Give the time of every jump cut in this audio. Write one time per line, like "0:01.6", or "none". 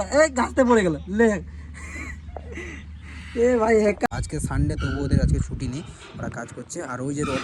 0:04.1